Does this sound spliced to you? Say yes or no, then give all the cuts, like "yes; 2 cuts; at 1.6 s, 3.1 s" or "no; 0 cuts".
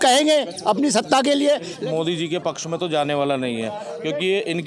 yes; 1 cut; at 1.8 s